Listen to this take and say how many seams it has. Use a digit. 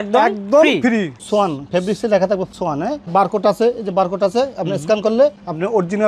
2